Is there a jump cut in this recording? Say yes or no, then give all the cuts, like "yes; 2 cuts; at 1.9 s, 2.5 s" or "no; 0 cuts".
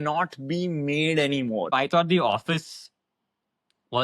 yes; 1 cut; at 1.7 s